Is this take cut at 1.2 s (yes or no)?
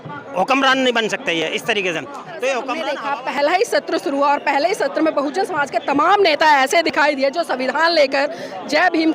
no